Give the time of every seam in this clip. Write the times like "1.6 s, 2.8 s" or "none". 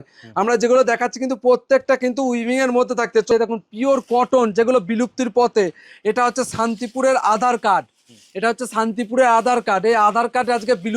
3.3 s